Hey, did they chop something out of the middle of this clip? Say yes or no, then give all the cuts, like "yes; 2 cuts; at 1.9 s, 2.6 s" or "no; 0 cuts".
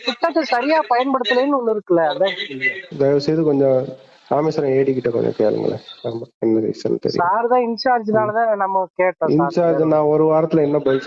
yes; 1 cut; at 2.9 s